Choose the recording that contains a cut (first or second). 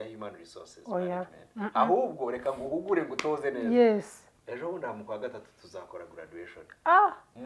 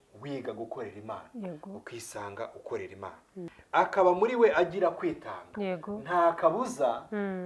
second